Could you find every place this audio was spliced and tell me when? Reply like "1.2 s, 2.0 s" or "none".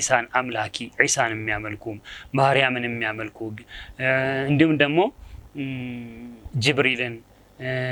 none